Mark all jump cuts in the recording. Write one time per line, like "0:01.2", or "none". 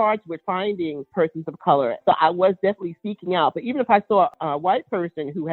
0:01.1
0:02.0